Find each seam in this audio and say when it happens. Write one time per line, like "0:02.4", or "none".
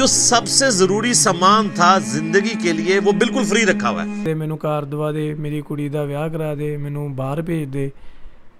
0:04.2